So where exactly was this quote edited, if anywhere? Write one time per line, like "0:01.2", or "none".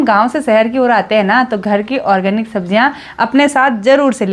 none